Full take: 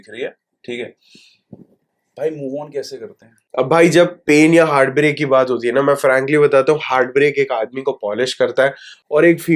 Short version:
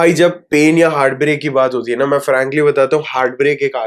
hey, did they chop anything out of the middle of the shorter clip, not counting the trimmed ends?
no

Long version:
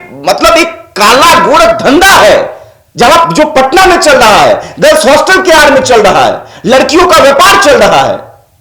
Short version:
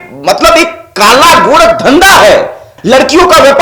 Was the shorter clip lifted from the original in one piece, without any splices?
no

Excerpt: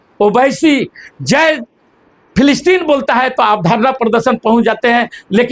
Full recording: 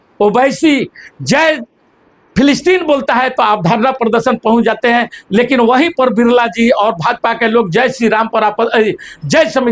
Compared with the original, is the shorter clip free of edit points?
yes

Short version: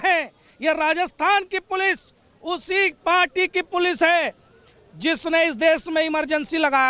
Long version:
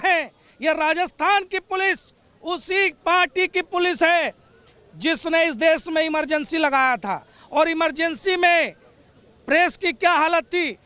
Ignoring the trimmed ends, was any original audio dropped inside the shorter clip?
no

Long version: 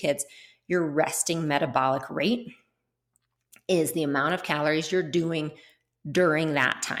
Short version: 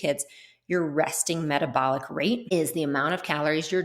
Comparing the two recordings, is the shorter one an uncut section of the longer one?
no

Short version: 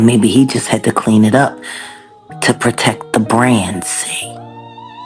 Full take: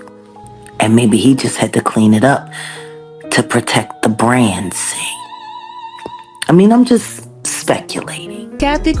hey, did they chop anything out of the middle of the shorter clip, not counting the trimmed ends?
no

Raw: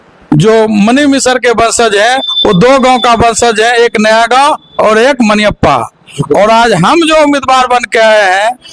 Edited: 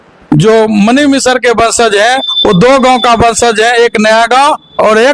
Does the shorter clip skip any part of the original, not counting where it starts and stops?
no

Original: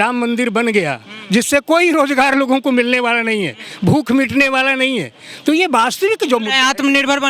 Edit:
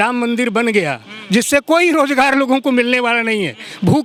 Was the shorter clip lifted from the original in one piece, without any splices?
yes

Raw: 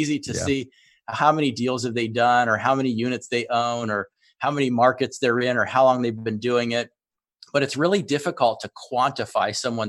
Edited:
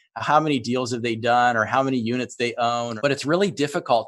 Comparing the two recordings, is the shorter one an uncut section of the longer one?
no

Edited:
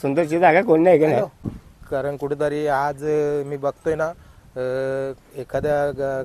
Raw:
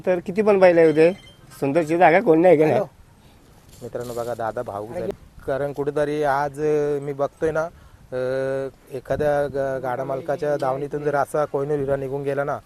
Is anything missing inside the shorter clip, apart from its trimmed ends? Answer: yes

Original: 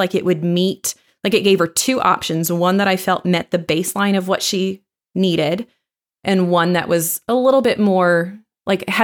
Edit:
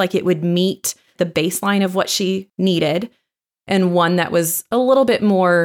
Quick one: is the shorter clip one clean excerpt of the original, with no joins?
no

